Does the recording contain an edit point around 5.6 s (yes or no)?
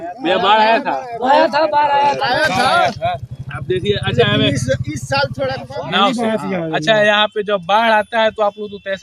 yes